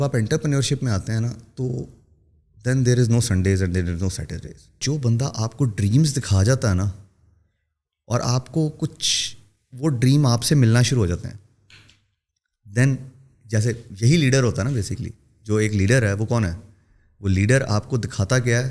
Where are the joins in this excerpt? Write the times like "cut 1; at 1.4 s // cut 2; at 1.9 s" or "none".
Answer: cut 1; at 4.8 s